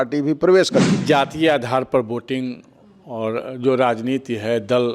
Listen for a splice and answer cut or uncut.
cut